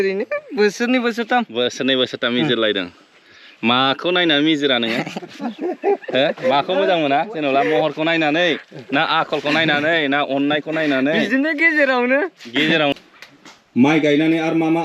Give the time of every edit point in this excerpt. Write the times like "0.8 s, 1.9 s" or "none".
12.9 s